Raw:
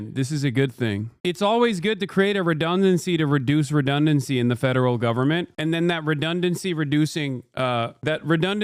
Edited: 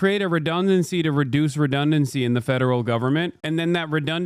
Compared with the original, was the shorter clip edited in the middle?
no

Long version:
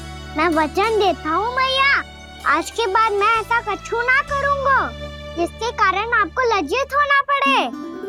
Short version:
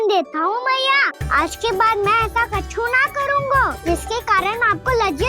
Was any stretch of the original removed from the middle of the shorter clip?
yes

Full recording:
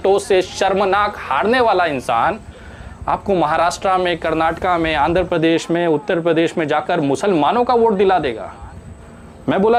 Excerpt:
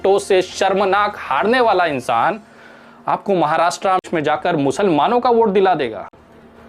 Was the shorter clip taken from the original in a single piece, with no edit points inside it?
no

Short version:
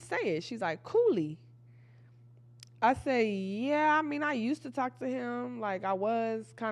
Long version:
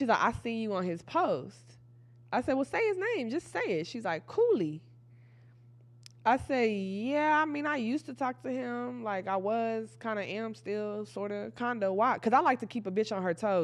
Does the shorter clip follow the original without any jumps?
yes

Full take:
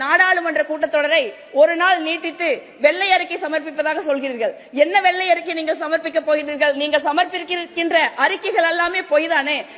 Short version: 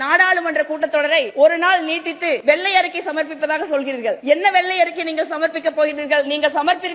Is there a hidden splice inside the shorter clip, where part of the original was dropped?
yes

